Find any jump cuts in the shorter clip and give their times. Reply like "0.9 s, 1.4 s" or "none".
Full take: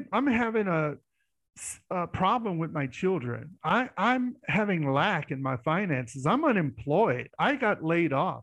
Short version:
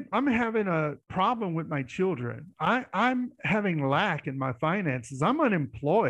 1.1 s

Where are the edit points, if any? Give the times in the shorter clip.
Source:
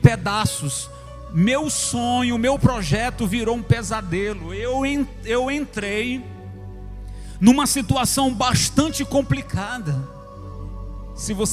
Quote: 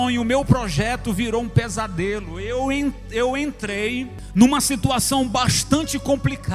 4.2 s

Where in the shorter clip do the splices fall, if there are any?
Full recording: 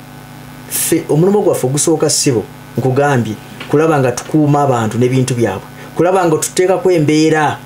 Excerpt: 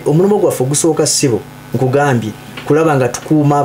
none

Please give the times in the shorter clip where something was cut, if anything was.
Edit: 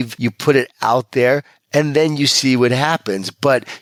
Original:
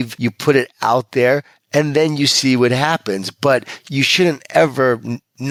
none

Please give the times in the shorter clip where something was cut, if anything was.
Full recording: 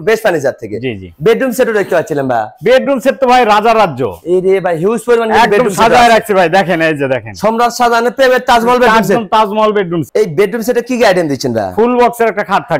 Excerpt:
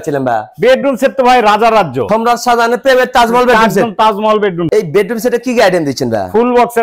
2.0 s, 4.7 s

